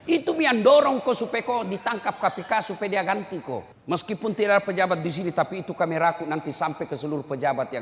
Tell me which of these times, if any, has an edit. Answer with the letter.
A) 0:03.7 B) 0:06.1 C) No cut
A